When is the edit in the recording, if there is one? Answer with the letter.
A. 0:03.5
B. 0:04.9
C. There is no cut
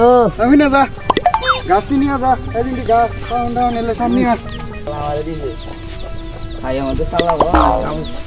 B